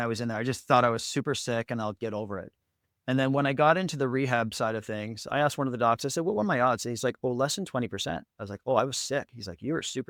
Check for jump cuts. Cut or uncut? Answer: uncut